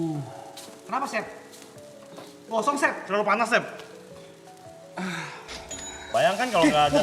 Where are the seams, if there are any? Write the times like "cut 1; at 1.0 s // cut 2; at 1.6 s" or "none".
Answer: cut 1; at 6.1 s